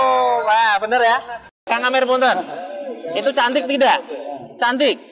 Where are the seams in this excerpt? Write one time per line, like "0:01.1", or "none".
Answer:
0:01.4